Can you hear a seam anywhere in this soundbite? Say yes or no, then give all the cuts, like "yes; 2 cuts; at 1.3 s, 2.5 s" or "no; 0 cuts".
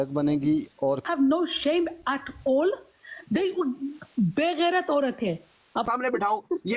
yes; 2 cuts; at 1.0 s, 5.9 s